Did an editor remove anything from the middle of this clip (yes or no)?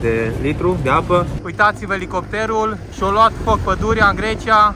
yes